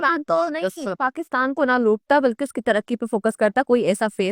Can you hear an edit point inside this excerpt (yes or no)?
no